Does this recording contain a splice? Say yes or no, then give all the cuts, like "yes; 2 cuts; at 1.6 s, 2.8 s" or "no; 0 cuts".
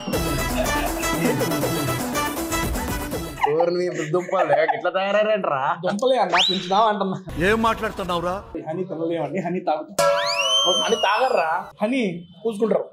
yes; 3 cuts; at 7.3 s, 8.5 s, 11.7 s